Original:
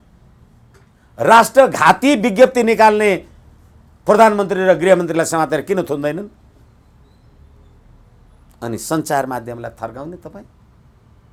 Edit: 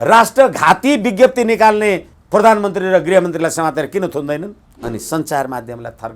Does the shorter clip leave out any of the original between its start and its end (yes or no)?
yes